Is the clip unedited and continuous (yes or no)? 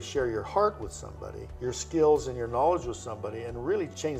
yes